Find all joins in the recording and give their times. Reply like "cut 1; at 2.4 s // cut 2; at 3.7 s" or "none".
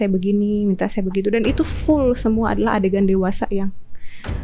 none